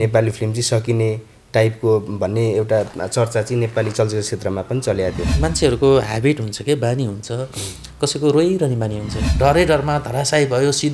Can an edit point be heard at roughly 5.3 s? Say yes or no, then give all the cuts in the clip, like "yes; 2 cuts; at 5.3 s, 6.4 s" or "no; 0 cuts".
yes; 2 cuts; at 5.3 s, 9.2 s